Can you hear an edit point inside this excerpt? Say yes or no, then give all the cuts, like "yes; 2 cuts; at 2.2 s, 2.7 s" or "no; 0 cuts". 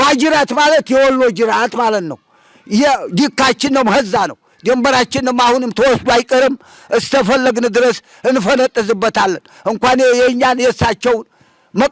no; 0 cuts